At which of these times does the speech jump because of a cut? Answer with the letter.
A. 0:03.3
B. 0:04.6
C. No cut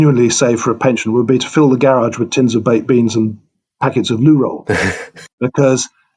C